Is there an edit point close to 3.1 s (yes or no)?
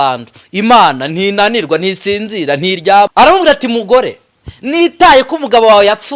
yes